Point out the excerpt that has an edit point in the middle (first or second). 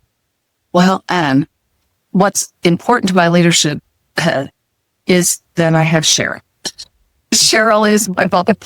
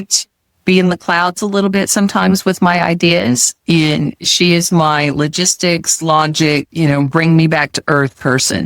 second